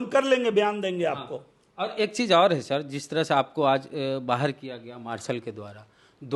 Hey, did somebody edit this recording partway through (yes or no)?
no